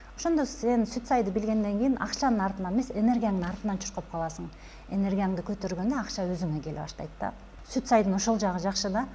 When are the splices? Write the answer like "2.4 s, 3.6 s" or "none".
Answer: 7.5 s